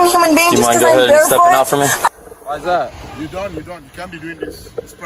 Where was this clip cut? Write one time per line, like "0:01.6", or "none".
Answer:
0:02.1